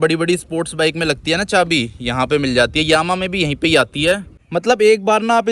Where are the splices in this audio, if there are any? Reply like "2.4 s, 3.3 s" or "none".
4.3 s